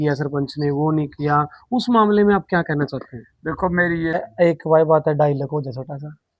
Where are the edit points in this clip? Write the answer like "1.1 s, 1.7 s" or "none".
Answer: 4.2 s